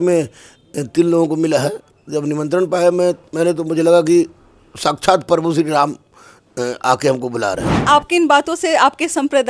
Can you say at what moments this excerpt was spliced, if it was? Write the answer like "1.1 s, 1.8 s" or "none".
1.9 s, 7.7 s